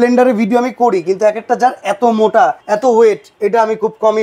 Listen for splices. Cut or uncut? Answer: cut